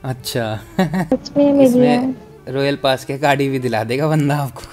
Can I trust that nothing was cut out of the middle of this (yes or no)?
no